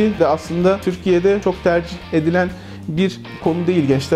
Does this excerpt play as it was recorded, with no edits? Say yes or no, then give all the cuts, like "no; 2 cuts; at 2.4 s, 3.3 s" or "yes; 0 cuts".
yes; 0 cuts